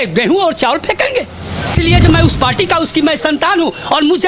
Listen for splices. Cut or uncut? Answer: cut